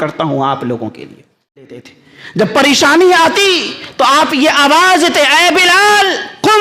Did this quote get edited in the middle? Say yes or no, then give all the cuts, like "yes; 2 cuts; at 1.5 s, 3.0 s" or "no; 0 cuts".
yes; 1 cut; at 1.7 s